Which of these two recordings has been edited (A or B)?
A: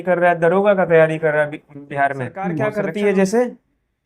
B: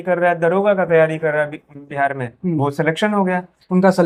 A